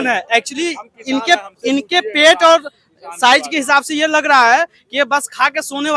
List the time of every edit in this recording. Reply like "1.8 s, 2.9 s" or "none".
none